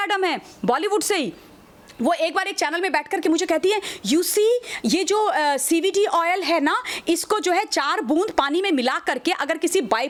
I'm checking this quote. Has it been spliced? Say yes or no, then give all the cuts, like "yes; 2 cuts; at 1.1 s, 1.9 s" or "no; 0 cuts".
no; 0 cuts